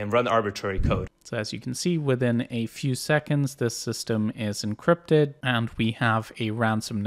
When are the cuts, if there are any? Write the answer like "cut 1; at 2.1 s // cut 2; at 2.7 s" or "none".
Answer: cut 1; at 1.2 s // cut 2; at 5.4 s